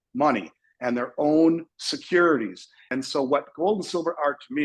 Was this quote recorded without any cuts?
no; 1 cut; at 2.9 s

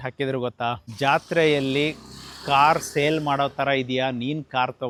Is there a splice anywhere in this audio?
no; 0 cuts

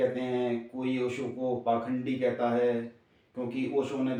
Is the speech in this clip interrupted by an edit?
no; 0 cuts

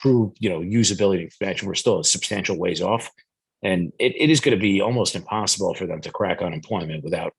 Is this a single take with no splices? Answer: yes; 0 cuts

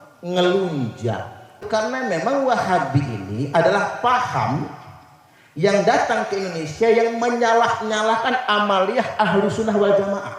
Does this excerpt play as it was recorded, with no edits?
no; 1 cut; at 1.7 s

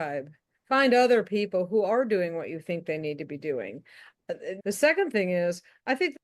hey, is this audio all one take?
no; 1 cut; at 4.6 s

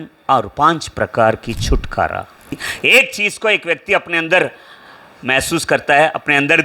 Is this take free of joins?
no; 1 cut; at 2.7 s

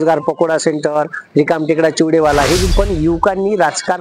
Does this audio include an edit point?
yes; 1 cut; at 2.7 s

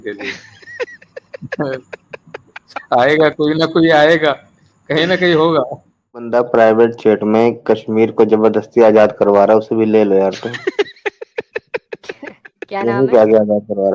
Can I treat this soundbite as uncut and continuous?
no; 1 cut; at 6.2 s

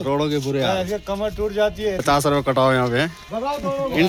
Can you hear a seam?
no; 0 cuts

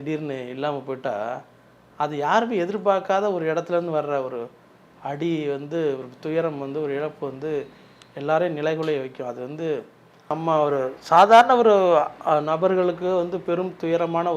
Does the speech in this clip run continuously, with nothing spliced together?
no; 1 cut; at 10.3 s

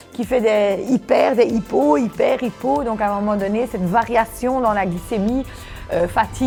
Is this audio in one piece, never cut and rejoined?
yes; 0 cuts

